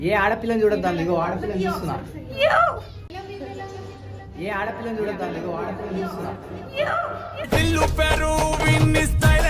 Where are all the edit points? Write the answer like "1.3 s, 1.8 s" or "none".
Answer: none